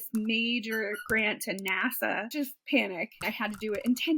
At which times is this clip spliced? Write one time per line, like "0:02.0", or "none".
0:02.2
0:03.3